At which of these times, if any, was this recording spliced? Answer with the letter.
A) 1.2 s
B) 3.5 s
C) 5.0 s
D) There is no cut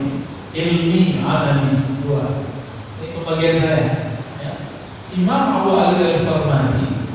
C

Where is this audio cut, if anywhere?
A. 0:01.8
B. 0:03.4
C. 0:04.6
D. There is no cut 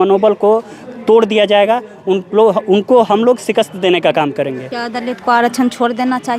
C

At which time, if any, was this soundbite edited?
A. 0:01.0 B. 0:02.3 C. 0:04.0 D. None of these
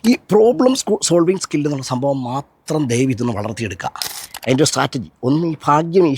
C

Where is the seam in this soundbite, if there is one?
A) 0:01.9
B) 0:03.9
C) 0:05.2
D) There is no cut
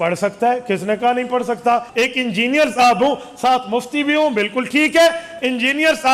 A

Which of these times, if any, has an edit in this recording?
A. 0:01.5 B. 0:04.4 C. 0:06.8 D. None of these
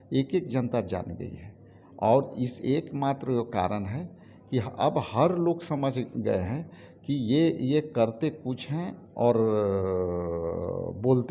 D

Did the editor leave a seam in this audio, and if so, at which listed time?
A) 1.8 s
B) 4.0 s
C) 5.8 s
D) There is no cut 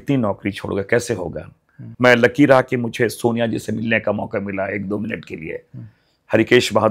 A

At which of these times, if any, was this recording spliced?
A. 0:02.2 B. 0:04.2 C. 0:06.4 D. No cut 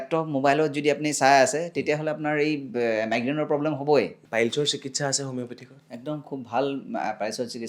B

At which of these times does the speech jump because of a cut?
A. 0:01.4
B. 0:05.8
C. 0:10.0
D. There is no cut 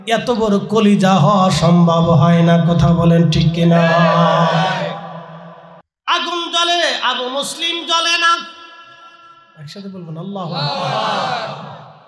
B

